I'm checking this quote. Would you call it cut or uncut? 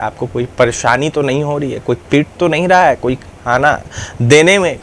uncut